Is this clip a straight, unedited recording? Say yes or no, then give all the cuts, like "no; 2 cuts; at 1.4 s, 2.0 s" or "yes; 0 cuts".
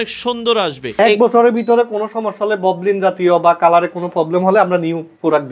no; 1 cut; at 1.0 s